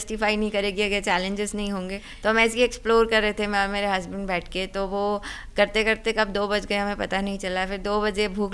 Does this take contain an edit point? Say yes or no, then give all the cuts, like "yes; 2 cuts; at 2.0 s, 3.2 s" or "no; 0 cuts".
yes; 1 cut; at 2.0 s